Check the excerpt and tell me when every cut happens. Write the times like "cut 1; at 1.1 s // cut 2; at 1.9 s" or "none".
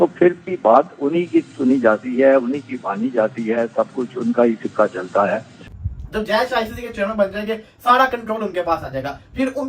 cut 1; at 5.5 s